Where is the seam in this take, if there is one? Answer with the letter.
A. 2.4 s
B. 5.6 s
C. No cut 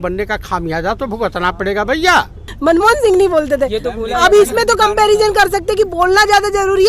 A